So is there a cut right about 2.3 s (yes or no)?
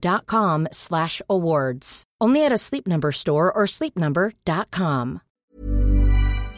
no